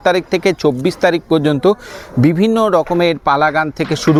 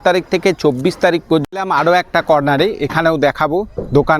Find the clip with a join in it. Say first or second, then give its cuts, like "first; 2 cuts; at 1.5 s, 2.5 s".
second; 1 cut; at 1.4 s